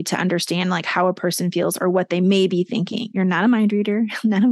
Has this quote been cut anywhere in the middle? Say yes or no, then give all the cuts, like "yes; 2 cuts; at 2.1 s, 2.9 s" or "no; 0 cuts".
no; 0 cuts